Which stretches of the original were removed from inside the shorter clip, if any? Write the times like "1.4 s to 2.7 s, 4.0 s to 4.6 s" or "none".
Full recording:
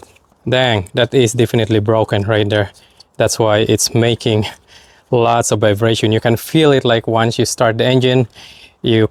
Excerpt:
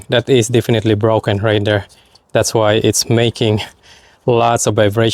none